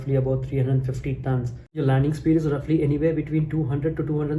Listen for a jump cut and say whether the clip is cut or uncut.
cut